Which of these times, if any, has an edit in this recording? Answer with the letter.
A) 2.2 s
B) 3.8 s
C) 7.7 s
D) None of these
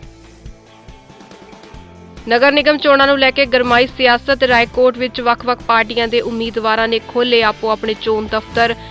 A